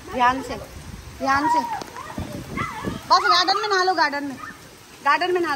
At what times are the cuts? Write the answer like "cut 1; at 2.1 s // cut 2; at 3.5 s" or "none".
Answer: none

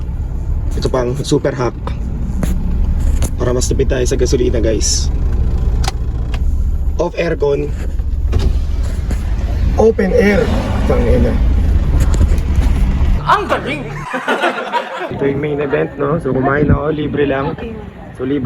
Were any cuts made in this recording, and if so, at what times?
cut 1; at 15.1 s

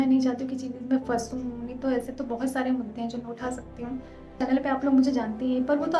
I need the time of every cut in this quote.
cut 1; at 4.4 s

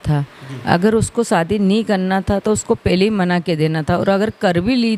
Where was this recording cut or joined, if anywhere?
none

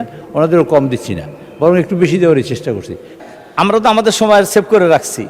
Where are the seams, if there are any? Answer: cut 1; at 3.2 s

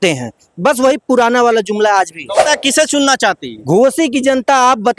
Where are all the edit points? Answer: cut 1; at 2.4 s

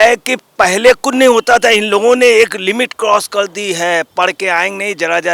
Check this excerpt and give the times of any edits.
none

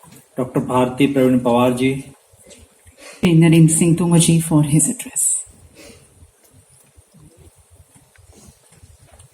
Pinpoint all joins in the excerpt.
cut 1; at 3.2 s

